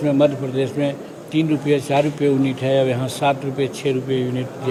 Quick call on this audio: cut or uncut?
uncut